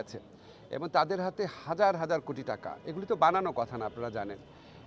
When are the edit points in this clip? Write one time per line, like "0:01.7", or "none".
none